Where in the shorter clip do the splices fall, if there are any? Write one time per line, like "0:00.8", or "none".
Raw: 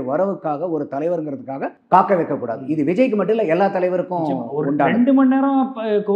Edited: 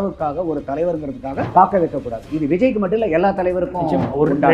0:01.5